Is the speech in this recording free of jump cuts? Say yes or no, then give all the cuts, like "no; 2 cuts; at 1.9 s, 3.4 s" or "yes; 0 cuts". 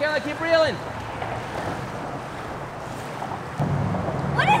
no; 1 cut; at 3.6 s